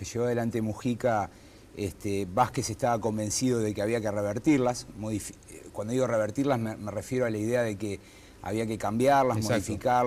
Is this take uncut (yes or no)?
yes